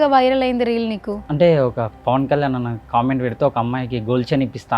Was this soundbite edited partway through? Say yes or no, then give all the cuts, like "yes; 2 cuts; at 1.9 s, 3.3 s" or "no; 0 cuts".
yes; 1 cut; at 1.2 s